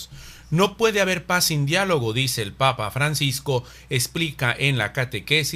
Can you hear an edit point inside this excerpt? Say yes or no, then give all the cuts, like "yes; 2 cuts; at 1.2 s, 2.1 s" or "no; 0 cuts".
yes; 1 cut; at 1.6 s